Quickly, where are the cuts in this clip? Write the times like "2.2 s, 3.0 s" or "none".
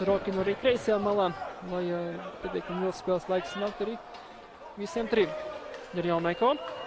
none